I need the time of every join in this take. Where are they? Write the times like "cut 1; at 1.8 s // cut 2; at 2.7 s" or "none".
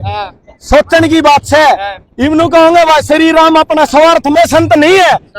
cut 1; at 4.3 s